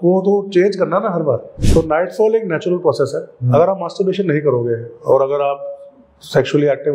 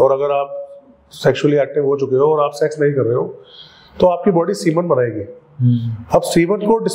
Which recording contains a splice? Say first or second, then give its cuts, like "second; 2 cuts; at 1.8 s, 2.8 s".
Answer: first; 1 cut; at 1.5 s